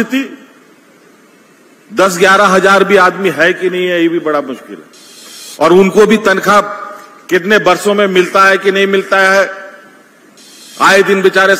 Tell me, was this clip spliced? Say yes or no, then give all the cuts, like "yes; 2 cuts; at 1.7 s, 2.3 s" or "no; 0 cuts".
no; 0 cuts